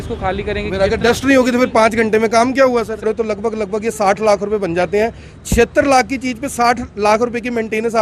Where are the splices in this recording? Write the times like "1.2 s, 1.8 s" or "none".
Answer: 3.0 s